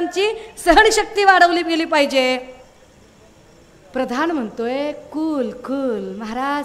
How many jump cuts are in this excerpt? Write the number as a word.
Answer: zero